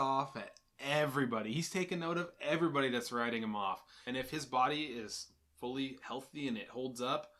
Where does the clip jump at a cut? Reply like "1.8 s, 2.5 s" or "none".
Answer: 4.0 s

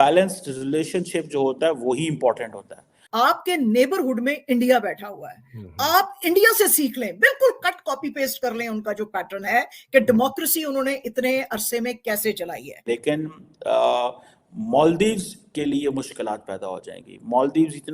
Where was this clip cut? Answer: 3.0 s, 12.7 s

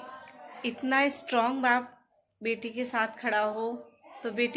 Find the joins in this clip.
none

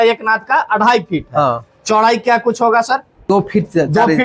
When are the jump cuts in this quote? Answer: none

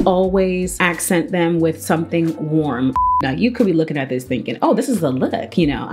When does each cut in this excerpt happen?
2.9 s

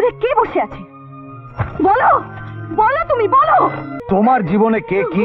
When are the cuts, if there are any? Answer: 3.9 s

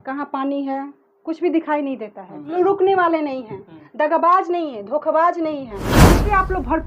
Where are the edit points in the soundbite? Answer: 2.5 s, 5.9 s

